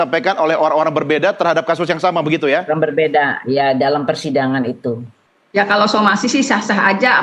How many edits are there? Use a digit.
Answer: 1